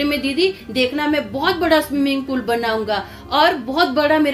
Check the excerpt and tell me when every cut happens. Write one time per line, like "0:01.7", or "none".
none